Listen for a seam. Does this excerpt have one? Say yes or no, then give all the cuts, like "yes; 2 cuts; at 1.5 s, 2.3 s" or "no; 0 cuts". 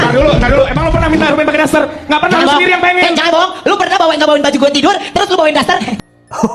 no; 0 cuts